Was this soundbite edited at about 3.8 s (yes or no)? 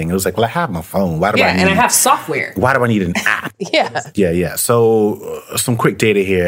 yes